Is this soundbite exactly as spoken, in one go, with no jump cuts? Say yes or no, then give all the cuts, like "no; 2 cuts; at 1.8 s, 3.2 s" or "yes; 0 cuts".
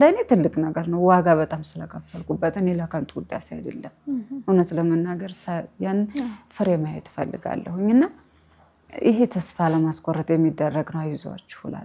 yes; 0 cuts